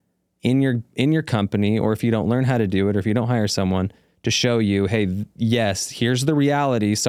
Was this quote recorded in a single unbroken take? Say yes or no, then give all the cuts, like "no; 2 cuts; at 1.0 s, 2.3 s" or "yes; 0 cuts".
yes; 0 cuts